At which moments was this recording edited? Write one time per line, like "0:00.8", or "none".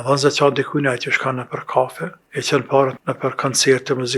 0:02.1
0:02.9

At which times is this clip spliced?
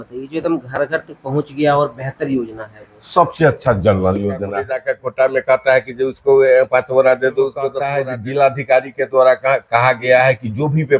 0:04.7
0:07.8

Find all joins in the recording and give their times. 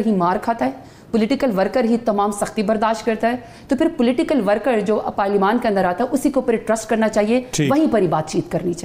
none

